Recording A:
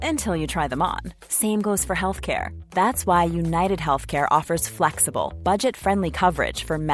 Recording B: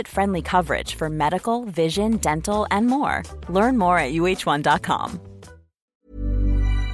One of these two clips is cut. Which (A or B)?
B